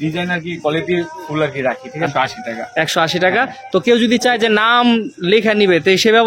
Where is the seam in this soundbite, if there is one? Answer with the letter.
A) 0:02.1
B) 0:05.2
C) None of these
A